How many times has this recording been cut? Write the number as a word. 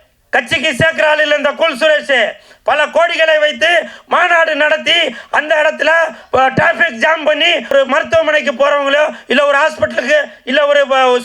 one